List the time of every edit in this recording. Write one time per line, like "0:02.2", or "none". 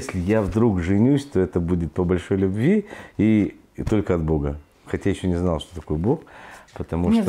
none